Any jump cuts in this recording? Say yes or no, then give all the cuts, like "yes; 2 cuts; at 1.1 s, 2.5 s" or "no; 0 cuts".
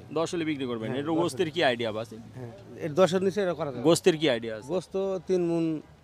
no; 0 cuts